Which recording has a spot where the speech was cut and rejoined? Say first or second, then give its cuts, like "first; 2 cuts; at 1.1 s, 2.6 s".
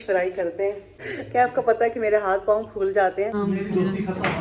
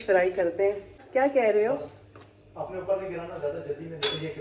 first; 2 cuts; at 1.0 s, 3.3 s